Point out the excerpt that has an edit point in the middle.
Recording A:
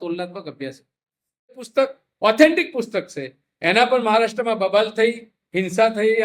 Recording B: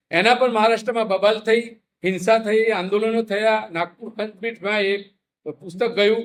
A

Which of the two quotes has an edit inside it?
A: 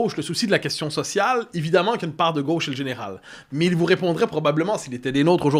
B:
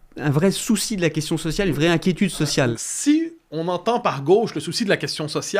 B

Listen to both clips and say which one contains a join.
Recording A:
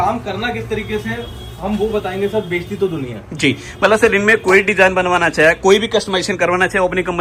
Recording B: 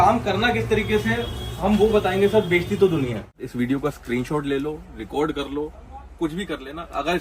B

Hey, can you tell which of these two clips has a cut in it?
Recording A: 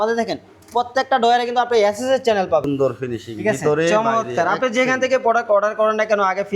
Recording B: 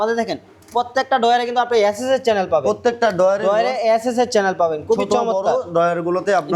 A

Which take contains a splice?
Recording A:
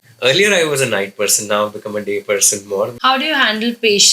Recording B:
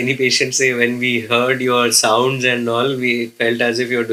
A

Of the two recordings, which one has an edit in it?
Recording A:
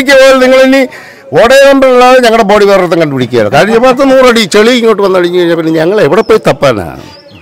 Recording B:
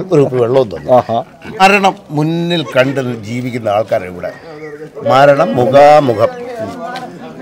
B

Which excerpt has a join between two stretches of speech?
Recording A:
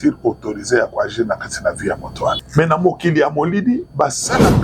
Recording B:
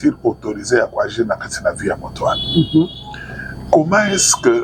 A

